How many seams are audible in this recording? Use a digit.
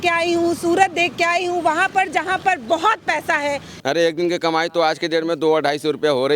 1